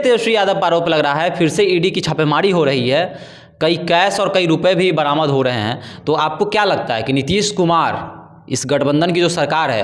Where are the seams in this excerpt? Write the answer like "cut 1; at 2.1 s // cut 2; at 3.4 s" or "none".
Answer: none